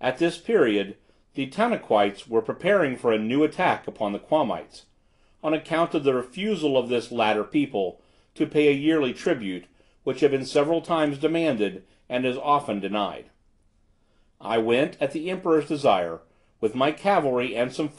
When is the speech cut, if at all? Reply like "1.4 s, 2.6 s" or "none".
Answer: 15.2 s